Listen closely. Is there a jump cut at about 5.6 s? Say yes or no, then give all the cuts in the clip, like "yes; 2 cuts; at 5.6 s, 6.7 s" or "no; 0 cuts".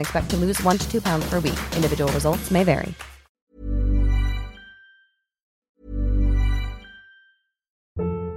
yes; 1 cut; at 5.6 s